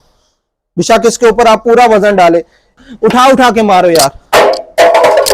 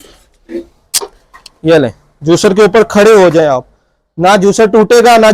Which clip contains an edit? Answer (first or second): first